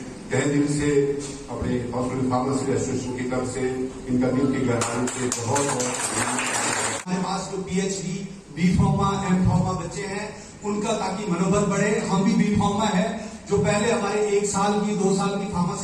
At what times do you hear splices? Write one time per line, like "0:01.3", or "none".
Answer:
0:07.1